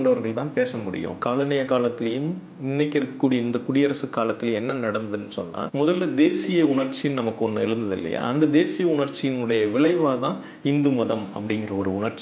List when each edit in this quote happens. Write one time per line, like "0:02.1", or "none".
0:01.2
0:05.6